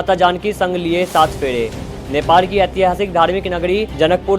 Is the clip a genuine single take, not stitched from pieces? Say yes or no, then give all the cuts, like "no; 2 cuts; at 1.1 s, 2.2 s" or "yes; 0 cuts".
yes; 0 cuts